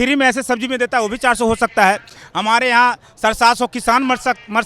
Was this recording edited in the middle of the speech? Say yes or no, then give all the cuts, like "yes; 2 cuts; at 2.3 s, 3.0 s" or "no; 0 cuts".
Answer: no; 0 cuts